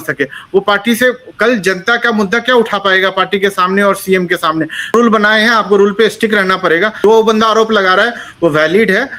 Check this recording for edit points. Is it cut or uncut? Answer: cut